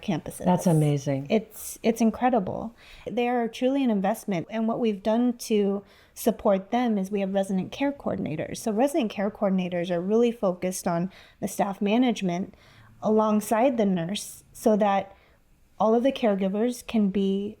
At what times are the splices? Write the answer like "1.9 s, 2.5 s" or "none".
3.1 s, 4.4 s